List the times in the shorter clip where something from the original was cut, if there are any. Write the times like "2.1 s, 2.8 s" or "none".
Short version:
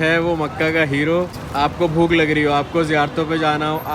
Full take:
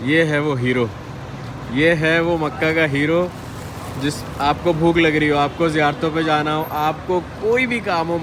1.4 s